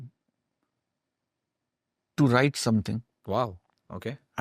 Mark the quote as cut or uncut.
uncut